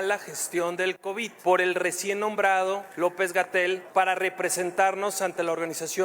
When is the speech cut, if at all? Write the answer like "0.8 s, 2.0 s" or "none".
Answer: 1.3 s, 2.9 s, 3.8 s